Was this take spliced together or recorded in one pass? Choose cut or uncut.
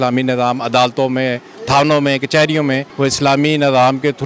cut